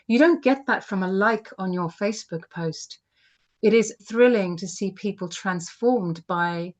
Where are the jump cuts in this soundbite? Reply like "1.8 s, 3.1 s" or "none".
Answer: 4.0 s